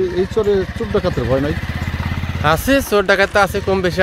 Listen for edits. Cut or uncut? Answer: uncut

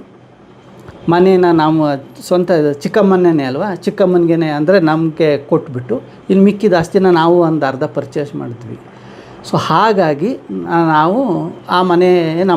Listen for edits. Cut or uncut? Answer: uncut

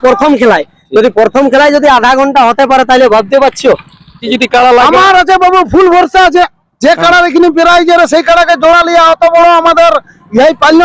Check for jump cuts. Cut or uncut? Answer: cut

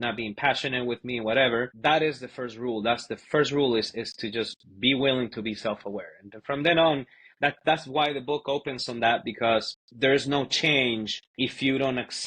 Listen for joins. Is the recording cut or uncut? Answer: cut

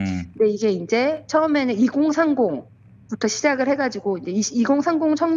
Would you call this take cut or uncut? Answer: uncut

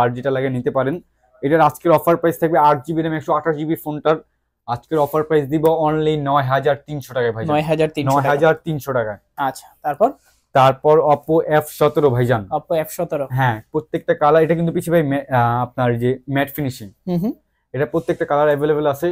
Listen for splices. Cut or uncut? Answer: uncut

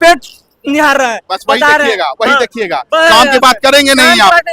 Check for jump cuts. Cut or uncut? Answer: uncut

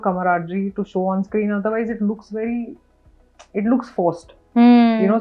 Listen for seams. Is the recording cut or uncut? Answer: uncut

